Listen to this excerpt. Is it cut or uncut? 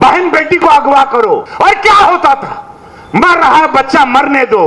cut